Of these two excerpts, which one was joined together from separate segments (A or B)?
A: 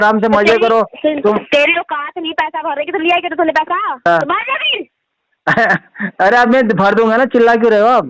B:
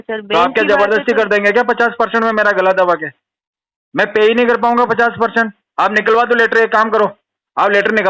A